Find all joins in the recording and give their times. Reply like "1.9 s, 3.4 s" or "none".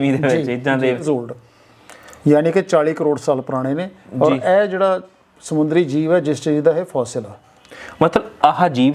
1.0 s